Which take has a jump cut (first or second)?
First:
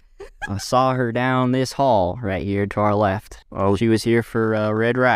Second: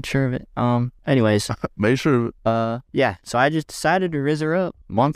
second